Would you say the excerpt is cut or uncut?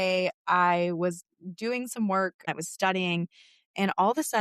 cut